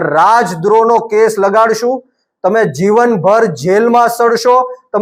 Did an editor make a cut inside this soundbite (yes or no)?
no